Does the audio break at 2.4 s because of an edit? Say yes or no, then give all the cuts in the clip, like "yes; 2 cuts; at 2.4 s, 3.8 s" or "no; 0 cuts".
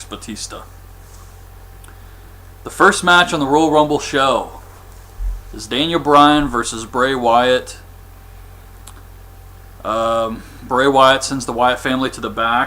yes; 1 cut; at 2.4 s